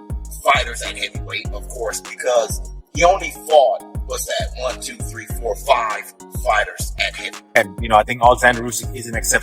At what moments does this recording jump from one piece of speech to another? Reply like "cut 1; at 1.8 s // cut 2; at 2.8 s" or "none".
cut 1; at 7.6 s